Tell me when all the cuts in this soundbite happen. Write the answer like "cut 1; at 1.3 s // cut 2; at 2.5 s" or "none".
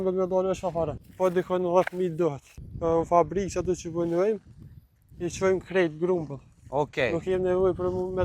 cut 1; at 1.0 s // cut 2; at 2.5 s